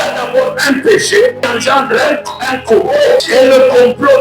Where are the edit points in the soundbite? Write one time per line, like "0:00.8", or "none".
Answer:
0:01.5
0:03.2